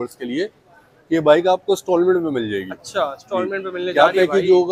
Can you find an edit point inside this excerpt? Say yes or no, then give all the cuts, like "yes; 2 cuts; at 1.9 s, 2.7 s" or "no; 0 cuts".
no; 0 cuts